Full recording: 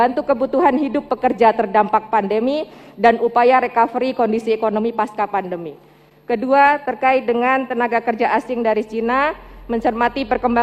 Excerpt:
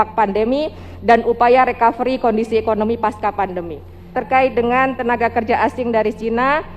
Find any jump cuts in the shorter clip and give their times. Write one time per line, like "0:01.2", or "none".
0:04.2